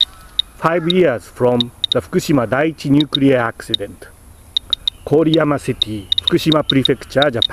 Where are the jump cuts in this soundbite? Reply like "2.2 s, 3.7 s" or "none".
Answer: none